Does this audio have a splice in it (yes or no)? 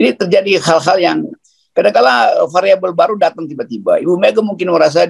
no